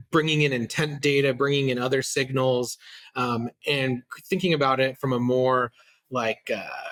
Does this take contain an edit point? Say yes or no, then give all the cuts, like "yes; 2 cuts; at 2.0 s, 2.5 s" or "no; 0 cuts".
no; 0 cuts